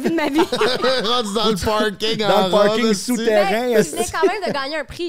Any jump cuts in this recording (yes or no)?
no